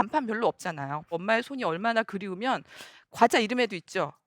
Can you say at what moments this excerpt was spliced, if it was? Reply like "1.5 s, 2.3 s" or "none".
1.2 s